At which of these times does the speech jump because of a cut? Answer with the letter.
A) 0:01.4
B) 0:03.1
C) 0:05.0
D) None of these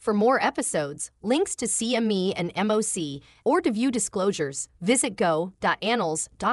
D